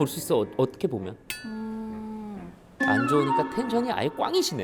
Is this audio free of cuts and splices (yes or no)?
yes